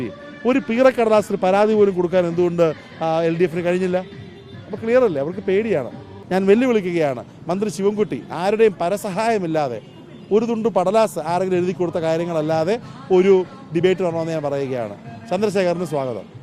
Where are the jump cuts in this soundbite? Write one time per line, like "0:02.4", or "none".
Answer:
0:06.1